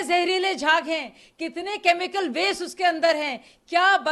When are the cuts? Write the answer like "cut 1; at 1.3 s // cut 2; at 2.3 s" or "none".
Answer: none